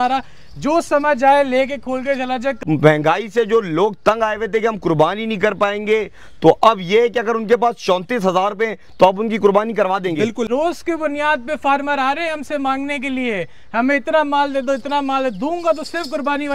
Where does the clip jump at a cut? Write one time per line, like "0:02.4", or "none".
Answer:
0:02.6
0:10.5

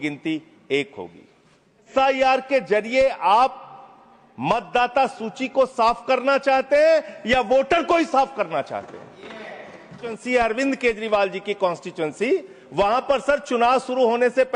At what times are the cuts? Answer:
0:01.9
0:10.2

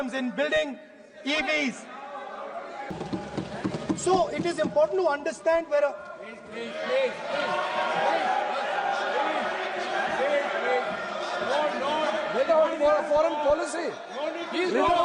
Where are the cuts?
0:02.9

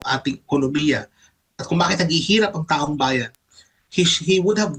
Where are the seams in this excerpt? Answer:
none

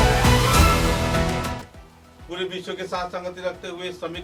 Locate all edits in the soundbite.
none

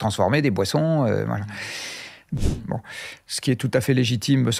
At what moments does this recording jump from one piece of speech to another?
0:02.2

